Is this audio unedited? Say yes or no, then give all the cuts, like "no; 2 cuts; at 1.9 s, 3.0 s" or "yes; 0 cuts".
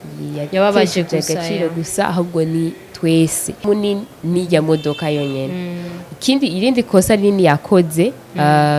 no; 1 cut; at 3.6 s